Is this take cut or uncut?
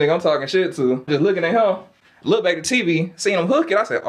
cut